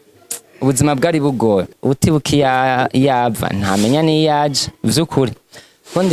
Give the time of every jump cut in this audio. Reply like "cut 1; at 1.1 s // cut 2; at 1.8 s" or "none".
cut 1; at 1.7 s